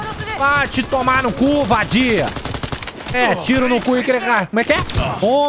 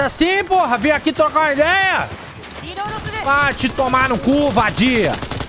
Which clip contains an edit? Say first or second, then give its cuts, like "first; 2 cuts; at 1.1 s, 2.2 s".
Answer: first; 1 cut; at 4.5 s